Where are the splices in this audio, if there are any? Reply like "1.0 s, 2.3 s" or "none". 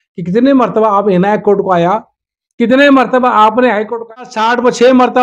4.2 s